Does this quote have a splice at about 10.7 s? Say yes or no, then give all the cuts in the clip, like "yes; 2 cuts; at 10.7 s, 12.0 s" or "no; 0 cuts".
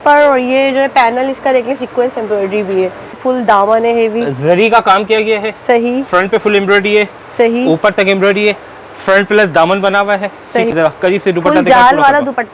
yes; 2 cuts; at 3.2 s, 10.7 s